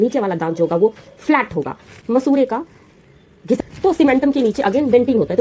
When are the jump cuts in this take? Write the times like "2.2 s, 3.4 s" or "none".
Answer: 2.0 s, 3.6 s